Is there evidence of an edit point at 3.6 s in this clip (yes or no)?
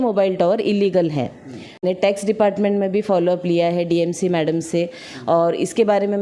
no